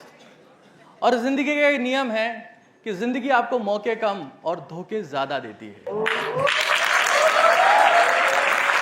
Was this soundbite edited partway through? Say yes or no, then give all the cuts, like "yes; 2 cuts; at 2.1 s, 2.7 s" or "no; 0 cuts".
no; 0 cuts